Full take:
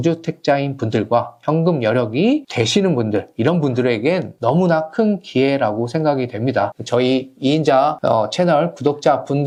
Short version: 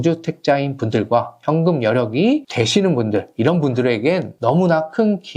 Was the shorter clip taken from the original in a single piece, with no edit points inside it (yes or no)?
yes